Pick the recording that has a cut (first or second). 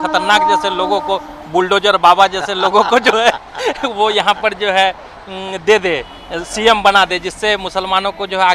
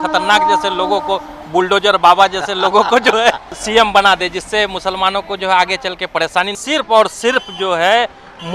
second